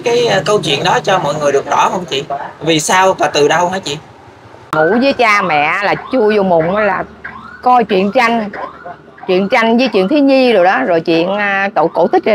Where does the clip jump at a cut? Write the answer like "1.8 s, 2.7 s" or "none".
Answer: 4.7 s